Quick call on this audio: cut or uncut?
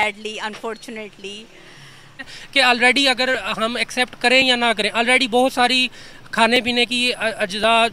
cut